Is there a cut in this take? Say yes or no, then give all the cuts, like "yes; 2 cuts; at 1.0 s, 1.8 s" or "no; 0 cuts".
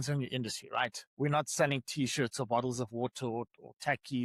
no; 0 cuts